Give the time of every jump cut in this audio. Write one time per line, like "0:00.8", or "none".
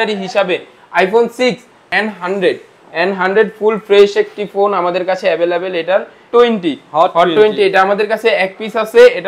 0:01.9
0:06.3